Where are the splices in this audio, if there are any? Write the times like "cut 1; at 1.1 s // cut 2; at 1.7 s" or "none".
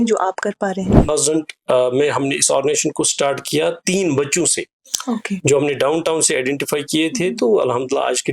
cut 1; at 1.1 s